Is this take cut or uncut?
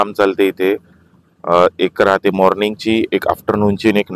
uncut